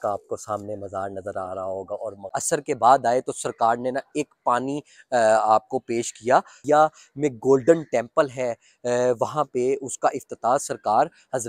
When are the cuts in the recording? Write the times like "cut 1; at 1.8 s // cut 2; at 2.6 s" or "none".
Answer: cut 1; at 2.4 s // cut 2; at 6.5 s